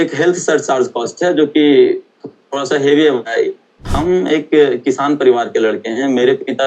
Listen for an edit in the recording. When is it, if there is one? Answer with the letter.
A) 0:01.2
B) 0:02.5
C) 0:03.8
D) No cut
C